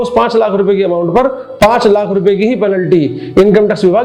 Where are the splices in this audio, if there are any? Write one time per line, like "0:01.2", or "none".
none